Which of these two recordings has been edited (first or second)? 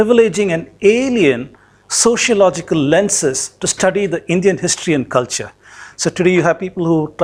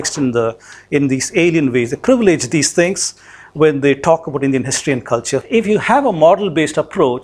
second